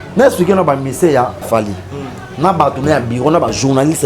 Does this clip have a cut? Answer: yes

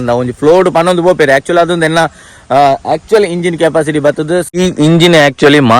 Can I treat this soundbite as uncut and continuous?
no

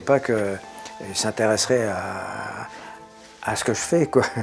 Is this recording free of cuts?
yes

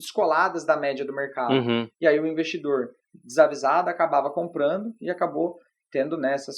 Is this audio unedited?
yes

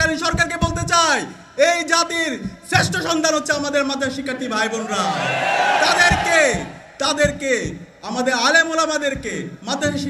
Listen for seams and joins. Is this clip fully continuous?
yes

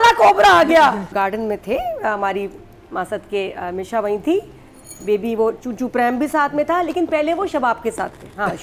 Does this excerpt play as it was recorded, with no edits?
no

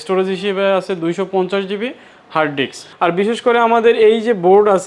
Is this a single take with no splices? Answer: no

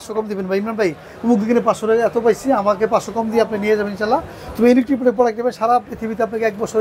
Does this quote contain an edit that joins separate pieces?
no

